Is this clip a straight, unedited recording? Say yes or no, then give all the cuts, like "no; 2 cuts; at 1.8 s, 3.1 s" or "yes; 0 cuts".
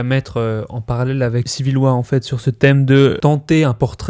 no; 2 cuts; at 1.5 s, 3.2 s